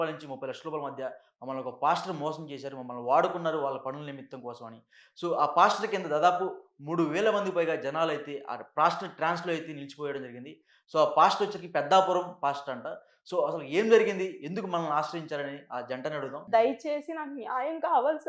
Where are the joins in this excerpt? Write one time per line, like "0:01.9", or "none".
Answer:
0:16.4